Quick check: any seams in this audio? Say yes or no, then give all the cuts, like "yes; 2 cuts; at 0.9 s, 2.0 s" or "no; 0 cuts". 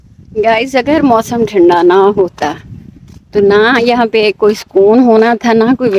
no; 0 cuts